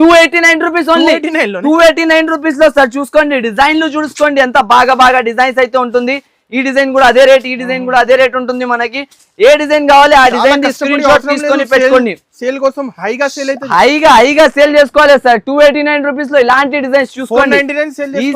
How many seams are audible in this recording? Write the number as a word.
zero